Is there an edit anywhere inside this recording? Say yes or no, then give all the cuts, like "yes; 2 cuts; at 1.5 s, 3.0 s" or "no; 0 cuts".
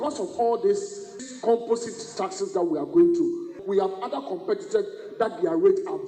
yes; 2 cuts; at 1.2 s, 3.5 s